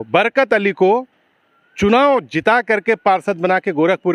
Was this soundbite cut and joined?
no; 0 cuts

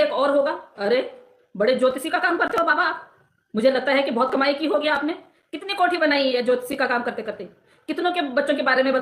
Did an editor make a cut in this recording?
no; 0 cuts

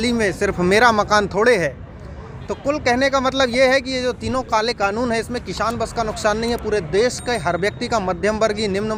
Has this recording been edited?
no; 0 cuts

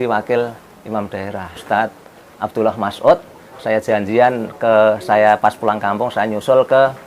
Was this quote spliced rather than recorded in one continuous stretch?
yes; 1 cut; at 1.6 s

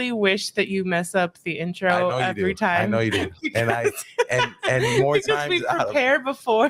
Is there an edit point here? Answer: no; 0 cuts

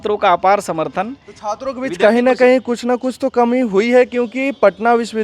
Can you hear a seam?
no; 0 cuts

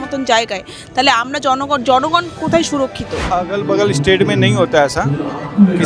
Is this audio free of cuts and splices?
no; 1 cut; at 3.3 s

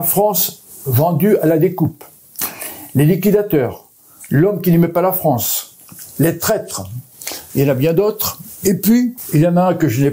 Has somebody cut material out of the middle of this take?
yes; 1 cut; at 9.2 s

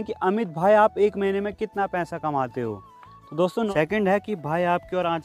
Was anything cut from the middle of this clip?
yes; 1 cut; at 3.7 s

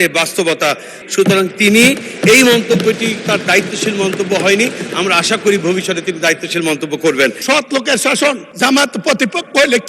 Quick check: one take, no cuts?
no; 2 cuts; at 1.0 s, 7.4 s

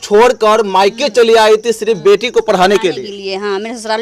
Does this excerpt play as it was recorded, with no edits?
yes; 0 cuts

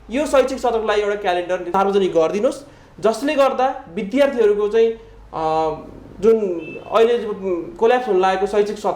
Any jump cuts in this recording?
yes; 1 cut; at 1.7 s

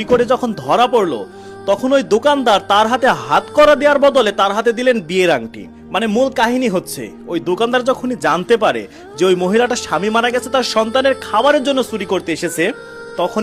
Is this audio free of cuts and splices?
yes; 0 cuts

